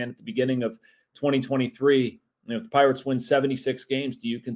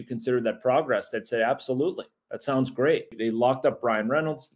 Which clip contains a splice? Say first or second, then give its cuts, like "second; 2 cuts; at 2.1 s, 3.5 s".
second; 1 cut; at 3.2 s